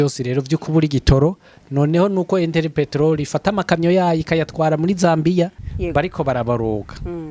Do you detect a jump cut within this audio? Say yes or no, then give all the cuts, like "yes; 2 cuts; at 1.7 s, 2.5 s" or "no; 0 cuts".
yes; 1 cut; at 5.6 s